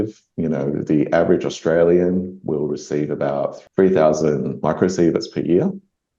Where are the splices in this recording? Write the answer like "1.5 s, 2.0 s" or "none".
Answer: 3.6 s